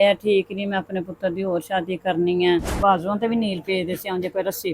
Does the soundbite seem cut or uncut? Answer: cut